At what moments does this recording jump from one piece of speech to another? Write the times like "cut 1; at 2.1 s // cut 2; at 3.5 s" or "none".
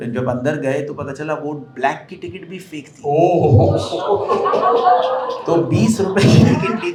none

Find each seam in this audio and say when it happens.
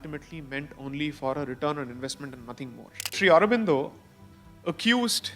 cut 1; at 3.2 s

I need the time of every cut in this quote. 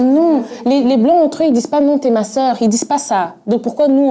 none

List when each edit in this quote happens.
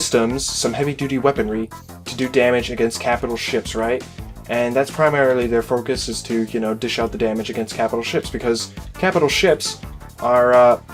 none

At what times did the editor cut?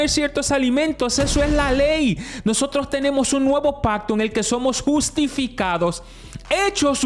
none

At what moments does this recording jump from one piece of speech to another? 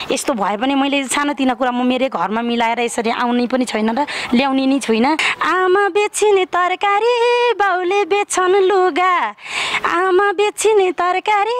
cut 1; at 5.3 s

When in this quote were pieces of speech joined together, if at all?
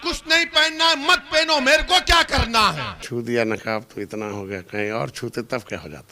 cut 1; at 2.9 s

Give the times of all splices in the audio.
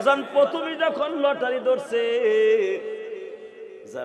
none

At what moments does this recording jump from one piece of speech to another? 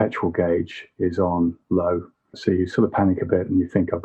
cut 1; at 2.3 s

